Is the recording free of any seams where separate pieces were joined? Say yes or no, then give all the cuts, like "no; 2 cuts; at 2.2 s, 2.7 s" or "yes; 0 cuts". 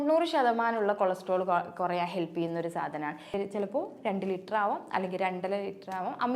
no; 1 cut; at 3.3 s